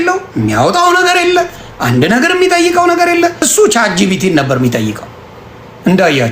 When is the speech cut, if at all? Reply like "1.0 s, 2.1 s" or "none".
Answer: 3.5 s